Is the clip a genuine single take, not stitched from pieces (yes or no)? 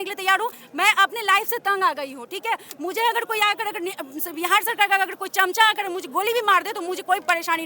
yes